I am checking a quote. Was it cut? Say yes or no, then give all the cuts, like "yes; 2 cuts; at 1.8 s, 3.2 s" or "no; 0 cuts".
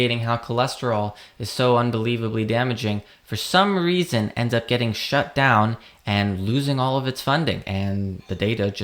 no; 0 cuts